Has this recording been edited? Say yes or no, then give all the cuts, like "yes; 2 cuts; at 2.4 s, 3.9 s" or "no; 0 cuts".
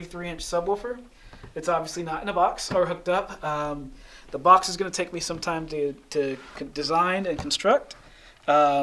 no; 0 cuts